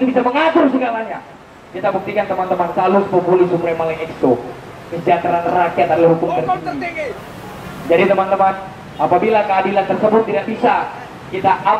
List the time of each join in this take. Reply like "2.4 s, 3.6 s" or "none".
none